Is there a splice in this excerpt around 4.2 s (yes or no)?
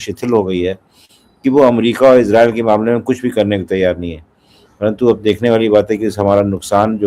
no